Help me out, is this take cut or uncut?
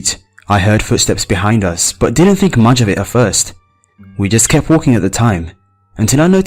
cut